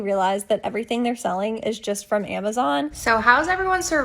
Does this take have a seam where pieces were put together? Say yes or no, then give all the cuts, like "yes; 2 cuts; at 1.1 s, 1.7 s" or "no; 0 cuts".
yes; 1 cut; at 3.0 s